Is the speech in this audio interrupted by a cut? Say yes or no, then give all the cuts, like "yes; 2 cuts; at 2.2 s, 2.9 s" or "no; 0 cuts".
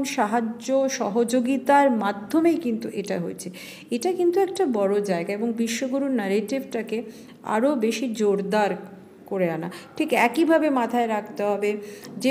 no; 0 cuts